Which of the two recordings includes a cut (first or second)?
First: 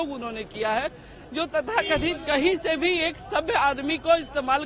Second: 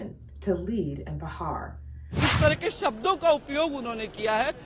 second